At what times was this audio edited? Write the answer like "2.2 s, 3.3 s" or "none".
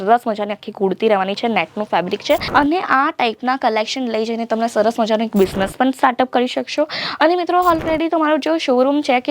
2.5 s